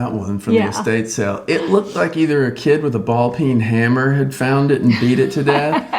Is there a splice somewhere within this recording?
no; 0 cuts

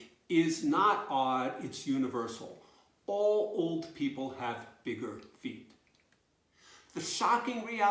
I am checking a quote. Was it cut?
yes; 1 cut; at 6.1 s

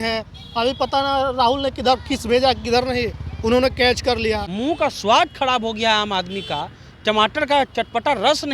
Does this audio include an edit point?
yes; 1 cut; at 4.5 s

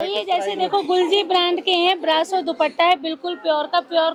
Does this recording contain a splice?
no; 0 cuts

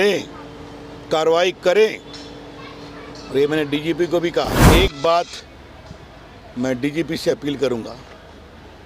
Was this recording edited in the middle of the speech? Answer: yes; 1 cut; at 4.6 s

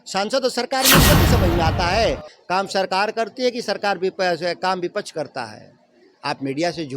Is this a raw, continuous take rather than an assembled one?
no; 1 cut; at 2.3 s

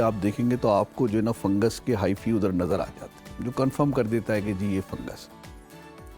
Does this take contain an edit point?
no; 0 cuts

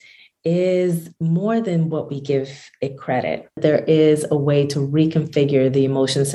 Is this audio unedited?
no; 1 cut; at 3.6 s

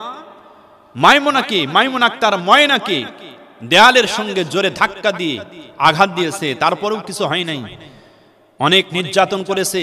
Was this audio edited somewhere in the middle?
no; 0 cuts

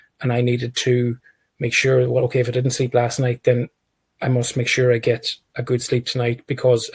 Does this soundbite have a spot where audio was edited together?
no; 0 cuts

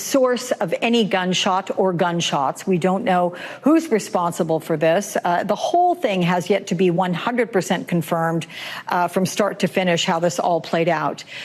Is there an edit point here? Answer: yes; 1 cut; at 6.8 s

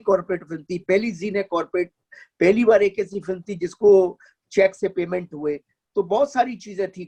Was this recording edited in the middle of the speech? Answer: no; 0 cuts

